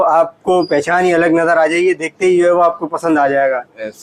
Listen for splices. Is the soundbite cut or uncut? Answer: uncut